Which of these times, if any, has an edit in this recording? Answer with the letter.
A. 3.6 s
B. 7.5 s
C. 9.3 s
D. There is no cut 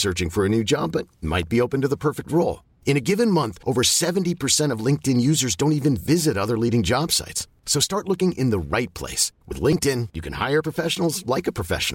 D